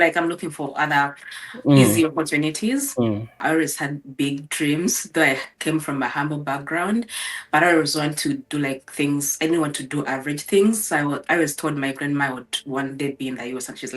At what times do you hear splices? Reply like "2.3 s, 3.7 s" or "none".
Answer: 3.4 s